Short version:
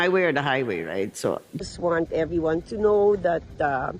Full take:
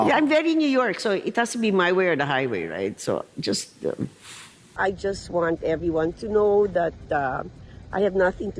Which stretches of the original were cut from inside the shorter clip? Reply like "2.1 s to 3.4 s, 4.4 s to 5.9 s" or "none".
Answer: 3.5 s to 5.1 s